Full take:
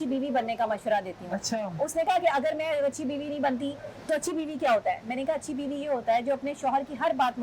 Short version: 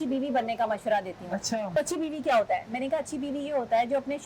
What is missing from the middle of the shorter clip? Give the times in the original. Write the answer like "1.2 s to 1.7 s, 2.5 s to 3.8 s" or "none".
1.7 s to 4.1 s

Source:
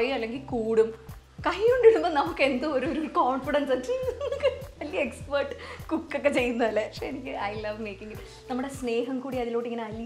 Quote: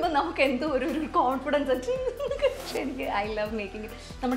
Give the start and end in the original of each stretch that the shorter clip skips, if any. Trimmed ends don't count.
4.7 s to 6.9 s

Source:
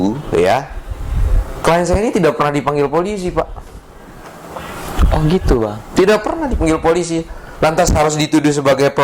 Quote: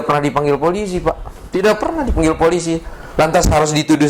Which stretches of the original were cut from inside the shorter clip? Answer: 3.7 s to 5.9 s

